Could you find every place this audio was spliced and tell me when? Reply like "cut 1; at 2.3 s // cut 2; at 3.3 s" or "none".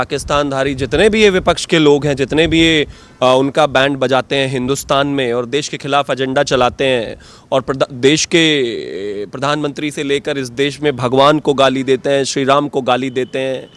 none